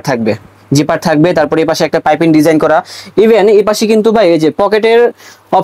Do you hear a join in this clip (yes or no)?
no